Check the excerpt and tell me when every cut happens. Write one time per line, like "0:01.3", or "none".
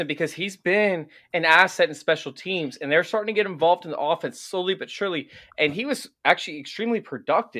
none